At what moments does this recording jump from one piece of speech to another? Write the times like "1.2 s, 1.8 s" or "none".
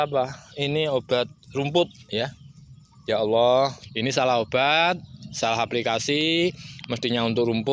3.8 s